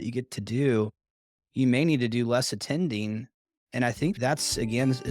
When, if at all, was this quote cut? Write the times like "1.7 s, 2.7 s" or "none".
4.2 s